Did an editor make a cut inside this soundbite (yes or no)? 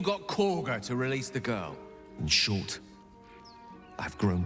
no